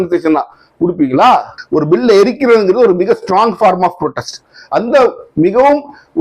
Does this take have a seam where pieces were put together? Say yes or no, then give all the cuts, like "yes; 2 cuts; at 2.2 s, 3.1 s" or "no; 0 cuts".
yes; 1 cut; at 1.6 s